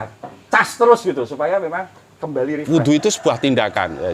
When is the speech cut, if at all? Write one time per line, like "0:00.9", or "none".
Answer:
0:02.6

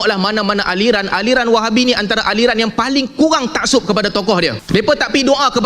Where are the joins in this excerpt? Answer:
0:04.6

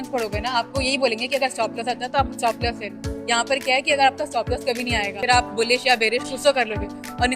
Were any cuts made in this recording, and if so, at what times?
0:05.2

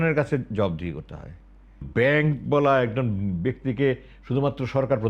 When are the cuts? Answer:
0:01.9

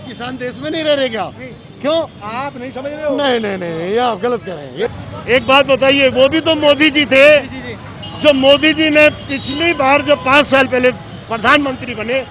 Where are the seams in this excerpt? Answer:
0:04.9

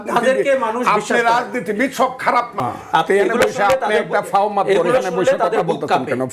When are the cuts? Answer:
0:02.5

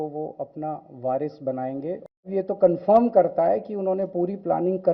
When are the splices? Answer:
0:02.2

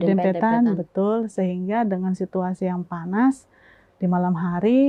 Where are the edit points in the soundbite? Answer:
none

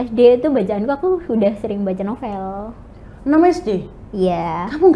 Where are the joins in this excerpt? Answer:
none

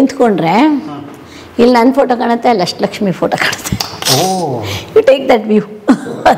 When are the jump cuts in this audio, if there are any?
none

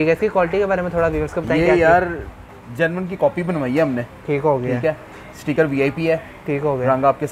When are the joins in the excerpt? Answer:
none

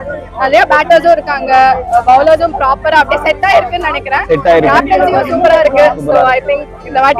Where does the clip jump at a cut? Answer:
none

